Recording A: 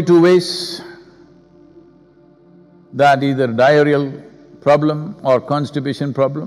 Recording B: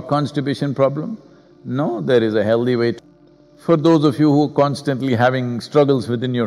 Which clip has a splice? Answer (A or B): B